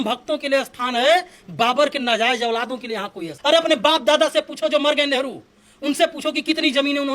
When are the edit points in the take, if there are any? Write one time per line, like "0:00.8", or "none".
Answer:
0:03.3